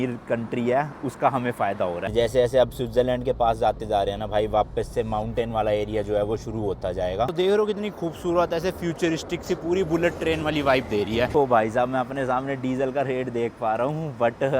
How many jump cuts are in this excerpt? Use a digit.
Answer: 3